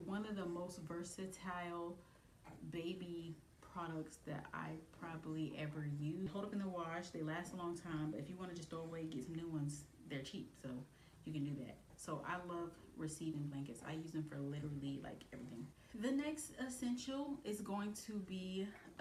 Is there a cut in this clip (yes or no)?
no